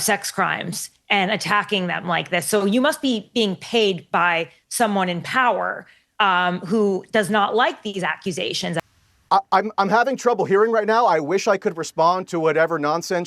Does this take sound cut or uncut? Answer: cut